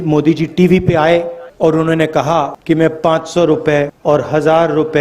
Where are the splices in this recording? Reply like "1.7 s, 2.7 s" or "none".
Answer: 1.4 s, 2.6 s, 3.9 s